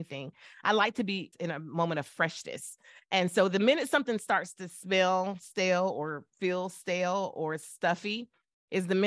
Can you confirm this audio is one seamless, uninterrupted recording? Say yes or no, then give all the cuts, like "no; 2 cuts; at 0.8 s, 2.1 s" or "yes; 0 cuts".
no; 1 cut; at 1.3 s